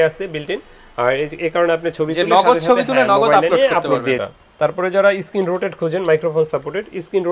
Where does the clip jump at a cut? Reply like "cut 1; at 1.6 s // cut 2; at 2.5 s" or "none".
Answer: cut 1; at 4.2 s